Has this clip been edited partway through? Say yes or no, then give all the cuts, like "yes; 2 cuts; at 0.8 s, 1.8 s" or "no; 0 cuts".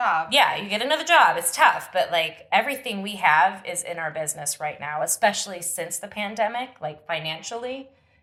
no; 0 cuts